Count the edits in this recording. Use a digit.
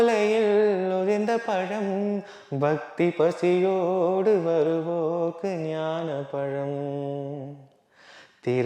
0